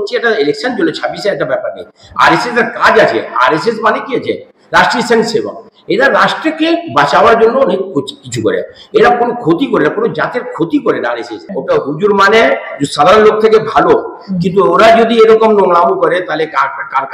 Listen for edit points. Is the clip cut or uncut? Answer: cut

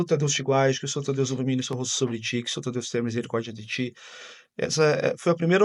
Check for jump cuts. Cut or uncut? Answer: uncut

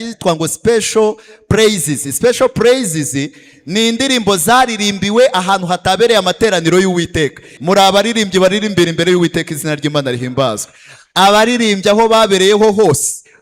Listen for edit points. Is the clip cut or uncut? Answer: cut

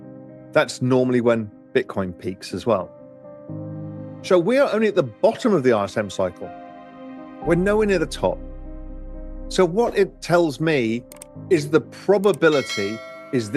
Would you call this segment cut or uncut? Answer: cut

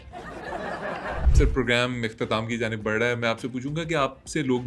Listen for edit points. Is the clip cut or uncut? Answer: cut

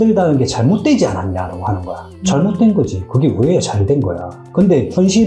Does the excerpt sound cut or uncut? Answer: uncut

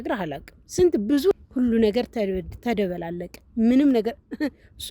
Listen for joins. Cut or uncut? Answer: cut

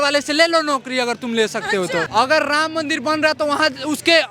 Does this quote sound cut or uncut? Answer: cut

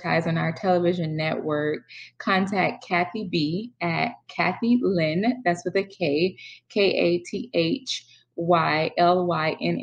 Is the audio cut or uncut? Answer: uncut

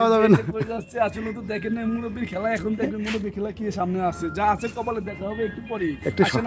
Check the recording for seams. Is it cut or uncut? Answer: uncut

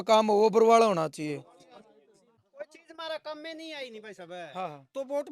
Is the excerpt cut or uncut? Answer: cut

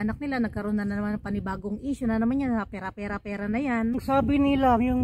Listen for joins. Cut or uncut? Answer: cut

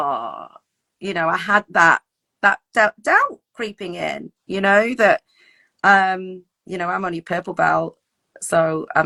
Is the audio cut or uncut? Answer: uncut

